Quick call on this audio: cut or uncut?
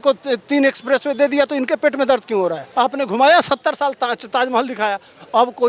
cut